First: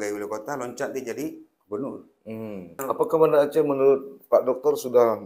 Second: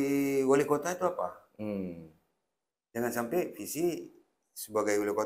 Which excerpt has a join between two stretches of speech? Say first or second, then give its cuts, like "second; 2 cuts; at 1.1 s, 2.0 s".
first; 1 cut; at 2.8 s